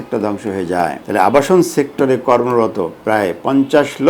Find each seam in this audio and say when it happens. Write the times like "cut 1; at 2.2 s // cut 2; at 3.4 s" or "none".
cut 1; at 1.0 s